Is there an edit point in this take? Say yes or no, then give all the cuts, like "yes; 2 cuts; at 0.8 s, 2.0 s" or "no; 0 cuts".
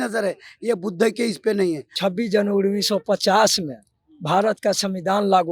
yes; 1 cut; at 1.9 s